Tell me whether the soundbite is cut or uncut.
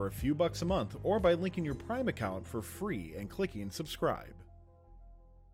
cut